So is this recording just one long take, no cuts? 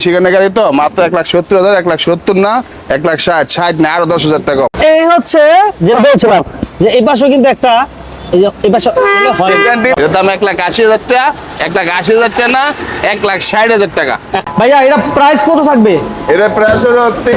no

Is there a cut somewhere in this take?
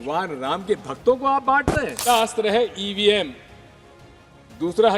yes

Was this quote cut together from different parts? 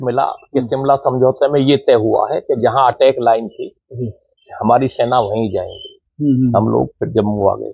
no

